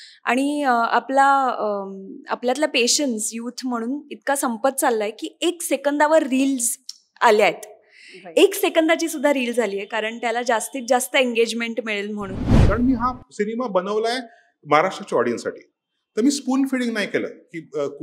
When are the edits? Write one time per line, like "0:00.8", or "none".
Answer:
0:12.7